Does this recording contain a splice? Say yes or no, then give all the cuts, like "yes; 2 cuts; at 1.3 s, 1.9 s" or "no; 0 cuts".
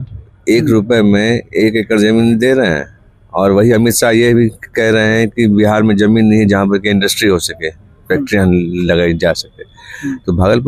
no; 0 cuts